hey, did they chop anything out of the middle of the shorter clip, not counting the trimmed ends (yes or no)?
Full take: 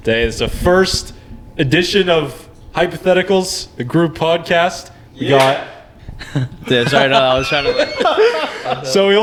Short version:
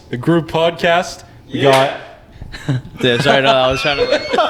no